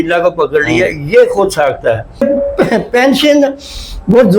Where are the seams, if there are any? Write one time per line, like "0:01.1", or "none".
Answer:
0:02.2